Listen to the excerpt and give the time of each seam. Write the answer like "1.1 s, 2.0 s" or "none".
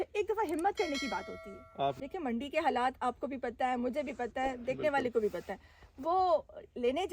2.0 s